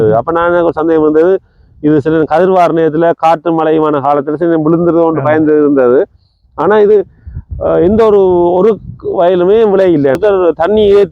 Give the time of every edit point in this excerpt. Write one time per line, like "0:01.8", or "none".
0:10.2

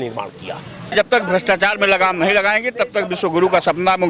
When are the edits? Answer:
0:00.9

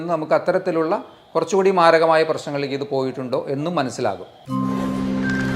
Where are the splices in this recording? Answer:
0:04.3

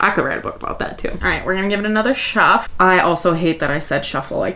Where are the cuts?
0:01.2
0:02.7

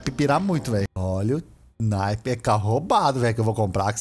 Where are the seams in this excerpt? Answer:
0:00.9

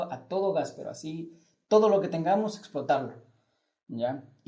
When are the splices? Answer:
none

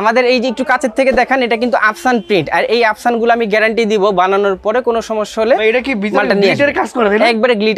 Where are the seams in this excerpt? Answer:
none

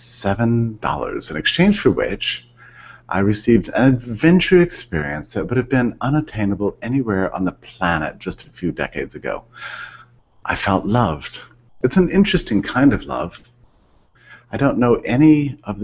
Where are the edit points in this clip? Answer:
0:08.5

